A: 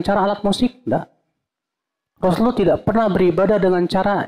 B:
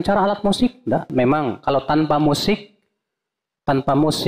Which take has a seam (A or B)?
B